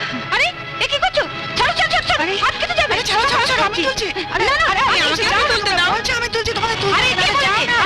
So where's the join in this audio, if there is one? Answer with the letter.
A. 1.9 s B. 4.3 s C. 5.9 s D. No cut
D